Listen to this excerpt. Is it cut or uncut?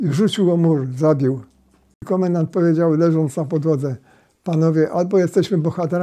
cut